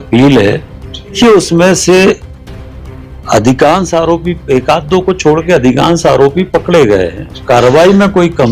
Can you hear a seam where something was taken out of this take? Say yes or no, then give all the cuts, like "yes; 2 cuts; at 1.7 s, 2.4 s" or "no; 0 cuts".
yes; 2 cuts; at 1.2 s, 7.4 s